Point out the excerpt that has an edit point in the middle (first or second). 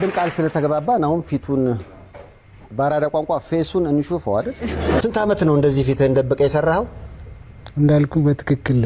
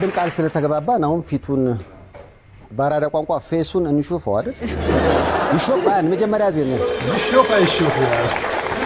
first